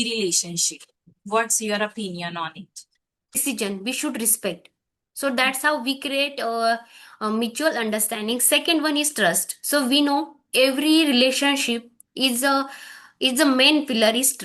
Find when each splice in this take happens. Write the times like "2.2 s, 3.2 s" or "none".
3.3 s